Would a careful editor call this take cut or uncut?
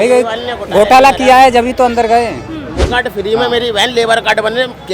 cut